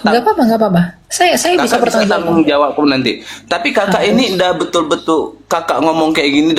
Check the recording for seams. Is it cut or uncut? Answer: uncut